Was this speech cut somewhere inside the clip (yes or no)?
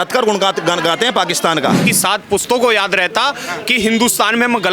yes